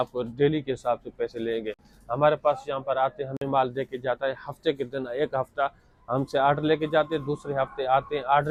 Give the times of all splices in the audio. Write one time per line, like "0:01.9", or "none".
none